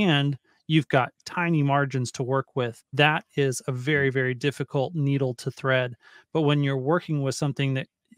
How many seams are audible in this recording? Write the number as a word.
one